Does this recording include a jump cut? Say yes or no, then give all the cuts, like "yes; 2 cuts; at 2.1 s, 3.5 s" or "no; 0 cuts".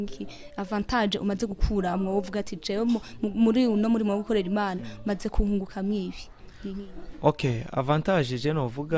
no; 0 cuts